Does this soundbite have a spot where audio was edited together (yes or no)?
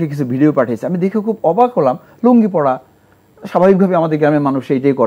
no